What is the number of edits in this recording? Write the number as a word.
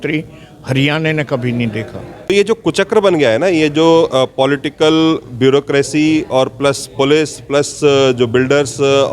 one